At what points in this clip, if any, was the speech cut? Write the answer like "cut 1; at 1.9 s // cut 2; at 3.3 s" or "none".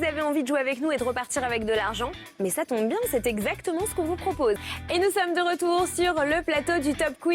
cut 1; at 5.1 s